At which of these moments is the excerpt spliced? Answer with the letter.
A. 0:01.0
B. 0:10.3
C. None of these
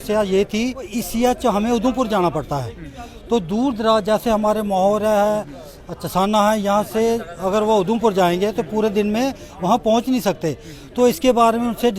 A